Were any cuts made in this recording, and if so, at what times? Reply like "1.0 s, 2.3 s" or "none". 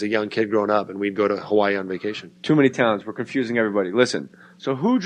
2.1 s